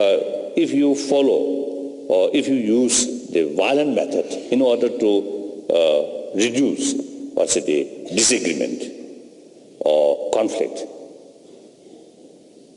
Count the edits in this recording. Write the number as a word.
one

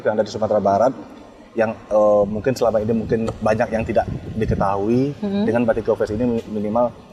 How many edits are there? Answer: zero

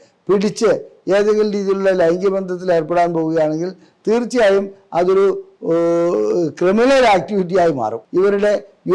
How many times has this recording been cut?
one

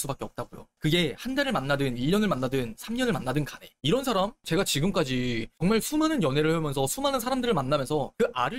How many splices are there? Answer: one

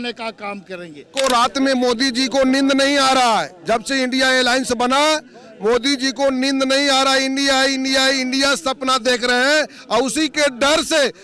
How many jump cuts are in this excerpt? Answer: one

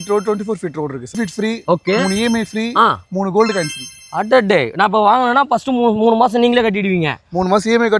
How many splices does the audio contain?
one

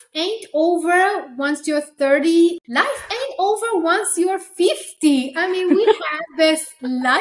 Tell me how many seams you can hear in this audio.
one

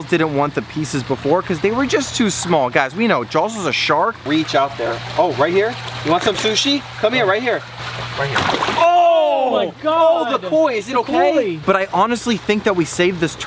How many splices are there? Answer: three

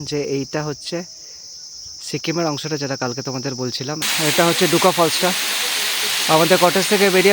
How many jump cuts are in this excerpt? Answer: one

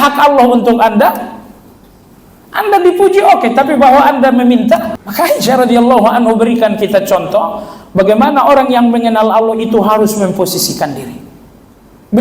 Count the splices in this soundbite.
one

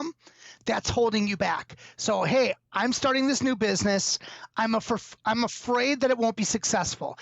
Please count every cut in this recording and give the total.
zero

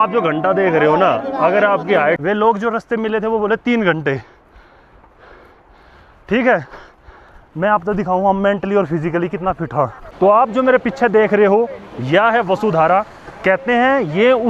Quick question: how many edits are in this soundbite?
two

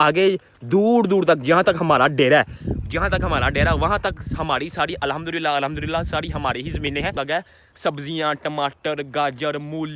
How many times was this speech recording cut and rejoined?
one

